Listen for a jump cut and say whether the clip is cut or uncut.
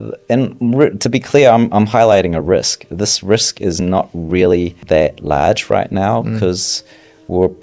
cut